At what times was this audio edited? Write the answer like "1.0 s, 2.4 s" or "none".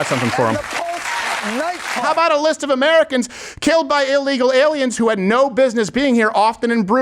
2.1 s

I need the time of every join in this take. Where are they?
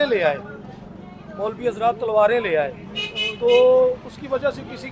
none

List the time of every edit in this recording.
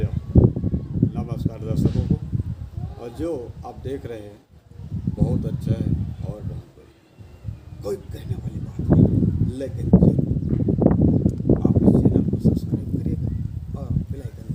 none

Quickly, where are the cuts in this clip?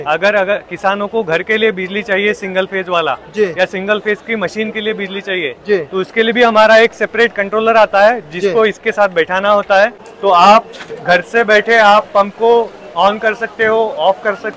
10.1 s

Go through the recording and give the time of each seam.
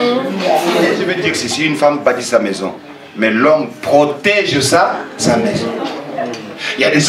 1.1 s, 5.7 s

